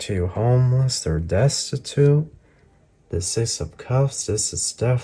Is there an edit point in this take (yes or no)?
no